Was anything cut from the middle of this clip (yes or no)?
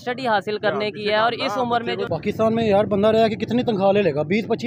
yes